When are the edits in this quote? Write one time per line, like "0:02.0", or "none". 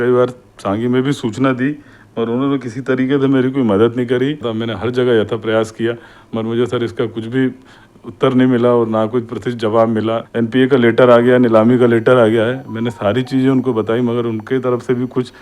0:04.5
0:10.2